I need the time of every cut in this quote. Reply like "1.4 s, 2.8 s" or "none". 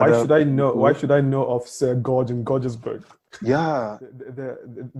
4.0 s